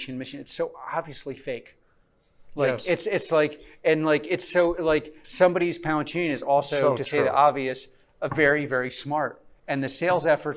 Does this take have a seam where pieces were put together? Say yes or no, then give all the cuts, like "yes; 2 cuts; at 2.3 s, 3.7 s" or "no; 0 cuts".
no; 0 cuts